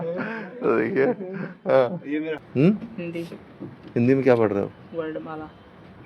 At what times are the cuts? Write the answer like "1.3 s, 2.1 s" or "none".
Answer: 2.4 s